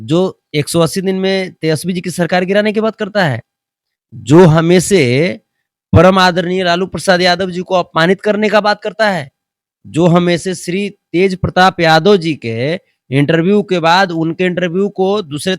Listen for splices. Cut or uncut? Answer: uncut